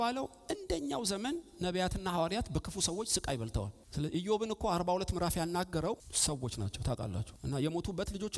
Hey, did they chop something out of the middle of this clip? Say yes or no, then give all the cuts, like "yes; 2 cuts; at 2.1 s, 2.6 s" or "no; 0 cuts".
yes; 3 cuts; at 3.8 s, 6.1 s, 7.3 s